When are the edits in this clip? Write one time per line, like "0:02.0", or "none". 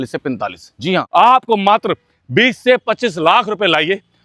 0:01.1